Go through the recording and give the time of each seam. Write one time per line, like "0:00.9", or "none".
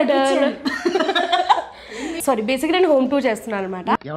0:02.1